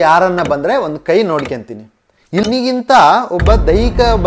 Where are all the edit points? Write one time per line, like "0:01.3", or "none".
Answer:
0:02.4